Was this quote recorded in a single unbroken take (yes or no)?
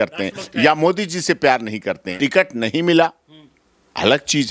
no